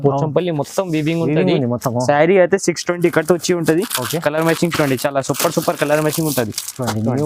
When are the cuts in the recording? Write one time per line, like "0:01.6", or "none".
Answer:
none